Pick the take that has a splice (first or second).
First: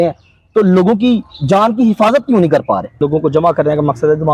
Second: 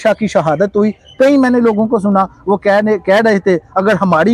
first